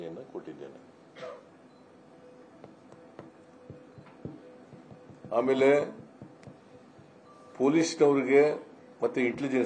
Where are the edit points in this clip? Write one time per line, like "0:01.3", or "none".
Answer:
none